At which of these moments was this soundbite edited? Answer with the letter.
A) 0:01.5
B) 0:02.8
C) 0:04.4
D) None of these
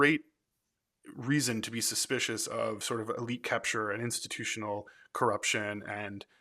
B